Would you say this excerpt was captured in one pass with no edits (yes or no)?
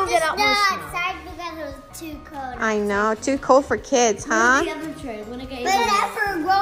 yes